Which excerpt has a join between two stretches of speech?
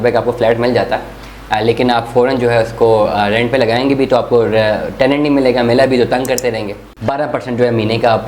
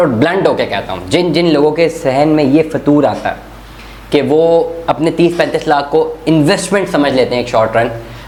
first; 1 cut; at 7.0 s

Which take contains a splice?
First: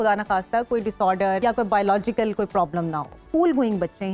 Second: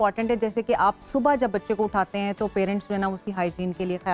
first; 2 cuts; at 1.4 s, 3.2 s

